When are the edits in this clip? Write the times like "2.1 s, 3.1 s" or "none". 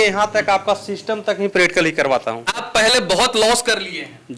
2.7 s